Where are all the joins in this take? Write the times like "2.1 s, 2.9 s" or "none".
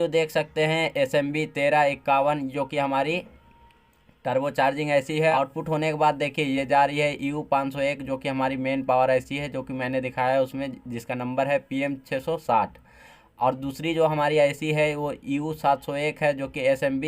5.3 s